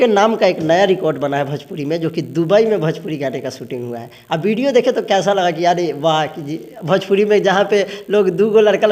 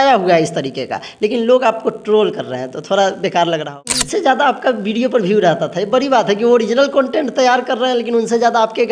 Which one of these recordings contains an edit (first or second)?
second